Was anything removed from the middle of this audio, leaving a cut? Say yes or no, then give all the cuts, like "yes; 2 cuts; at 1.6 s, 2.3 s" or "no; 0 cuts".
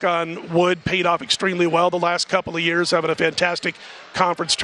no; 0 cuts